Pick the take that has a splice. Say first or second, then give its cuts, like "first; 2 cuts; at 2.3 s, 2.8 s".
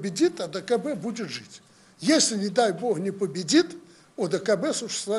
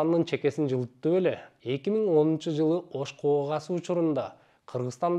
second; 1 cut; at 1.5 s